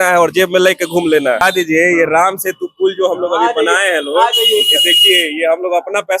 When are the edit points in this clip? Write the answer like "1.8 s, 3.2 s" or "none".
1.4 s